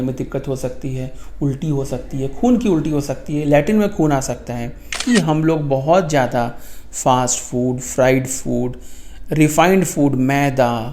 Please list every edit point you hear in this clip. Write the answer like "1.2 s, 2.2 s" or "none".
5.0 s